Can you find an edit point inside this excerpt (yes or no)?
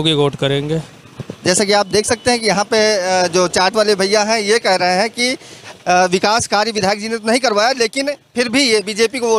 no